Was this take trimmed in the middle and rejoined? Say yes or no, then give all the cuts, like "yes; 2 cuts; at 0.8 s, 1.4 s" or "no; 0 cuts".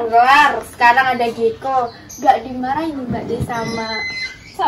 no; 0 cuts